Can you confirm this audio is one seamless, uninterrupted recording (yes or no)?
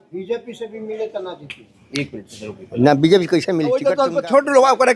no